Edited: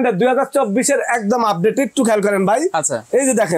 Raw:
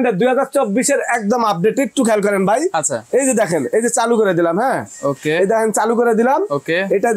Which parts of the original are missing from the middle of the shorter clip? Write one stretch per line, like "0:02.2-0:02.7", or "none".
none